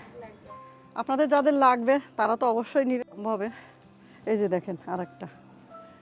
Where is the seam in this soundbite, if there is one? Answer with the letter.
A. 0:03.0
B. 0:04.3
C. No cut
A